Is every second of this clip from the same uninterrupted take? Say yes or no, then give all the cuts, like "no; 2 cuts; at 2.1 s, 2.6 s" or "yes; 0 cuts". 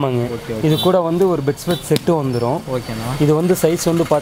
yes; 0 cuts